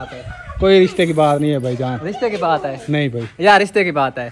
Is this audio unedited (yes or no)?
yes